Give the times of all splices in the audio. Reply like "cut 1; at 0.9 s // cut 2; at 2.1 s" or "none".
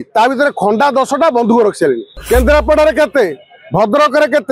cut 1; at 2.1 s